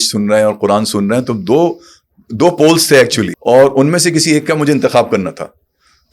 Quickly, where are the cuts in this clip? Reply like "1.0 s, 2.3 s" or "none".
3.3 s